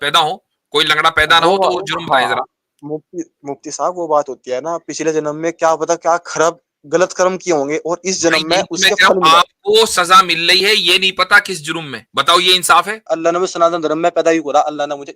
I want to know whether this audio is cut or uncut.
cut